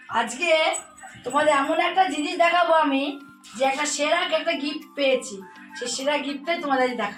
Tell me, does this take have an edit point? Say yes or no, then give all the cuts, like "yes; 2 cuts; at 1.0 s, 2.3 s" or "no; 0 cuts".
no; 0 cuts